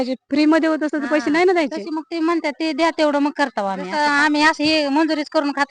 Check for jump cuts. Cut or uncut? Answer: cut